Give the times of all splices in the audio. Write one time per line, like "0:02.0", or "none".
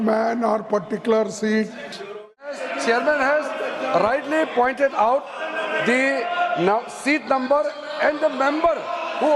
0:02.4